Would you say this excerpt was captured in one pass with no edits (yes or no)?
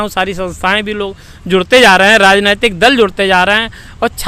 yes